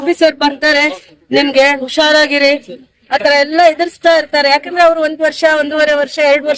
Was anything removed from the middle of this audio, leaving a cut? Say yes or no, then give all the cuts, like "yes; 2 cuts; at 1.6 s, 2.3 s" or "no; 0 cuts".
no; 0 cuts